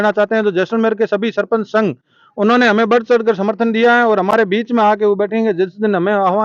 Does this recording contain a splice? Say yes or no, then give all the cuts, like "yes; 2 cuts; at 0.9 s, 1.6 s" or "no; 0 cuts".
no; 0 cuts